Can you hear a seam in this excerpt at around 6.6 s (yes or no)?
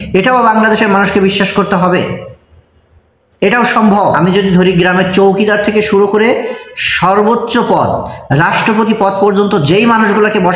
no